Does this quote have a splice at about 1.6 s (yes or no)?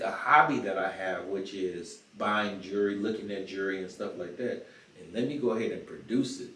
no